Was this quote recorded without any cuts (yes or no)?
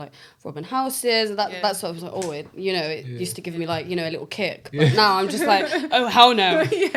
yes